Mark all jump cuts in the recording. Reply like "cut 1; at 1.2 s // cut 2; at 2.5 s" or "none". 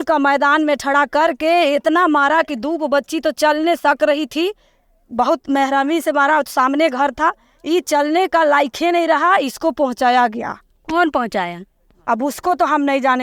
none